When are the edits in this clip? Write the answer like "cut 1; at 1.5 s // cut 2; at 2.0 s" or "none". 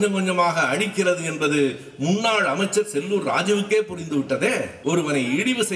cut 1; at 4.7 s